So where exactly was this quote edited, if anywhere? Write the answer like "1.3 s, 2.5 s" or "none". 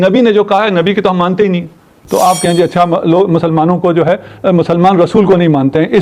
2.0 s